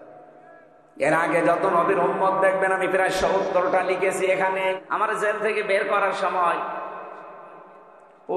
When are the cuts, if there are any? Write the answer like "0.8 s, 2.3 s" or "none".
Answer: 4.8 s